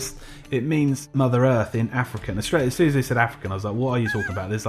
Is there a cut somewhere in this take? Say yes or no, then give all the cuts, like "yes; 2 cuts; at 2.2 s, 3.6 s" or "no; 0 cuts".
yes; 1 cut; at 1.0 s